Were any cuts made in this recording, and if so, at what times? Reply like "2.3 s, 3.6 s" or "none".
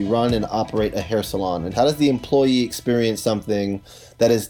1.7 s